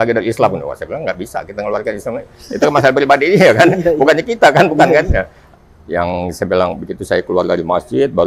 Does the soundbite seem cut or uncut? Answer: cut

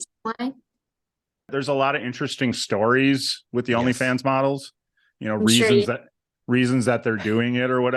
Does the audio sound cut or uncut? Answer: cut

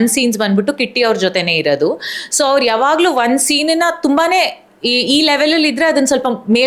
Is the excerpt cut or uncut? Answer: uncut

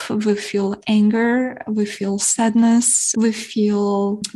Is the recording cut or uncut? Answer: uncut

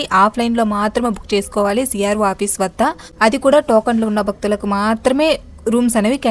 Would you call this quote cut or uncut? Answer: uncut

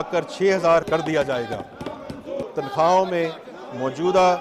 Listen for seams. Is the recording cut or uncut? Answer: cut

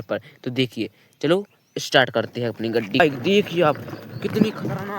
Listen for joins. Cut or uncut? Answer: cut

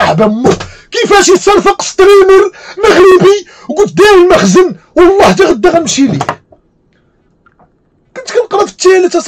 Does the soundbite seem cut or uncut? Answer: uncut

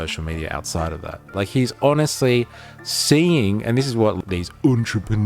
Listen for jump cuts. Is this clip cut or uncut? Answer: cut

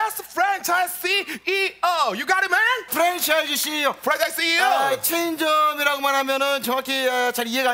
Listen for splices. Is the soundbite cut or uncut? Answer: cut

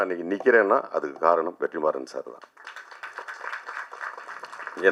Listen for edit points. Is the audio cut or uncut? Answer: uncut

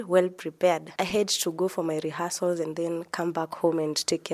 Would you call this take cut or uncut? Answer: cut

